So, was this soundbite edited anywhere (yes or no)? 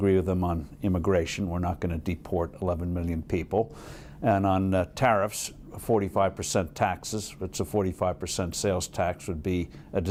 no